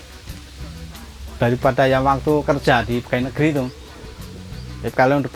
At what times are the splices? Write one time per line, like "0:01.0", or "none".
none